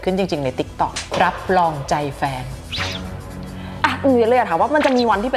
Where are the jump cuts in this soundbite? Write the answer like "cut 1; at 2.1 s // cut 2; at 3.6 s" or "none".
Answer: cut 1; at 3.6 s